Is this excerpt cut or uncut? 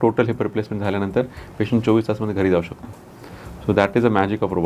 uncut